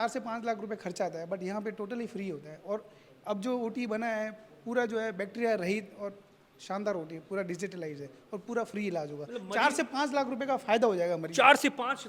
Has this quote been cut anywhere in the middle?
no; 0 cuts

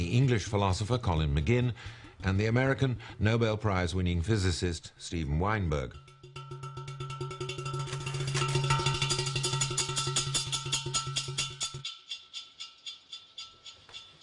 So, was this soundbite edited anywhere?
no; 0 cuts

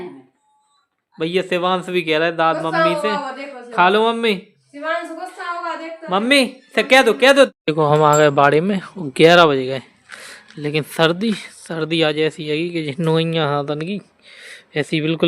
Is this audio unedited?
no; 1 cut; at 7.5 s

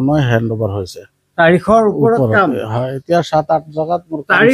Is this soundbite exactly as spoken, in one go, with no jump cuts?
yes; 0 cuts

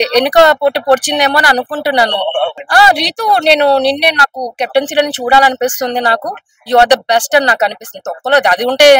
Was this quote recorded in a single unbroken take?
no; 1 cut; at 2.6 s

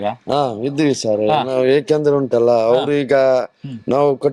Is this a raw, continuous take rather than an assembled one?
no; 1 cut; at 1.6 s

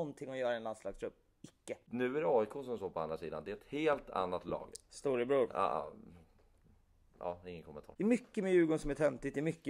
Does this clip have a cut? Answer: yes; 2 cuts; at 1.8 s, 7.8 s

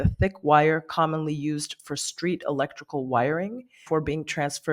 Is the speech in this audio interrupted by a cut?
yes; 1 cut; at 3.8 s

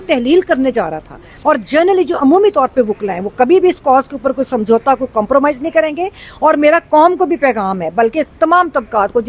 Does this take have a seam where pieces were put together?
yes; 1 cut; at 1.3 s

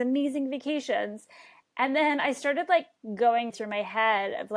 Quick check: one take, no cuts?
no; 1 cut; at 3.5 s

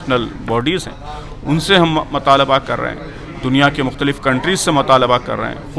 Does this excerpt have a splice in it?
no; 0 cuts

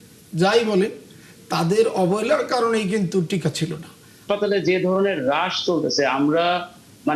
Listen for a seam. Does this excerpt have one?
yes; 1 cut; at 4.2 s

